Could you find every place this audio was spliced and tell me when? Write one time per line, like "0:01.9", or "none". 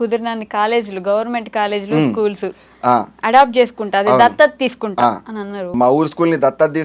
0:05.7